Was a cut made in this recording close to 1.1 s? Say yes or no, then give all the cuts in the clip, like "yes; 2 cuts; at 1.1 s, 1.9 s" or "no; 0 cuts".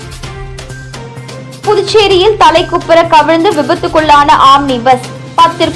no; 0 cuts